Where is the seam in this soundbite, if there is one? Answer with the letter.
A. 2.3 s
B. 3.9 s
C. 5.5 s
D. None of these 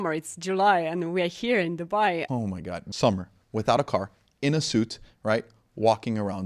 A